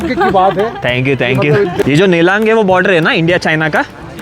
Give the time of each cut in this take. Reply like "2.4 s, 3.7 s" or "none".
1.8 s